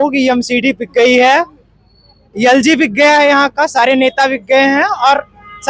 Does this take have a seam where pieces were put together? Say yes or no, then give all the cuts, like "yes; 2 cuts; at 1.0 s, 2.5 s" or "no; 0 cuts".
no; 0 cuts